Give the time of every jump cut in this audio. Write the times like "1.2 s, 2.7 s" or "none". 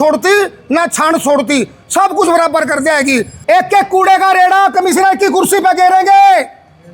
3.3 s